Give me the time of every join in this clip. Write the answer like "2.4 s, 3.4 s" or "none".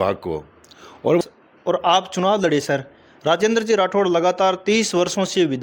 1.2 s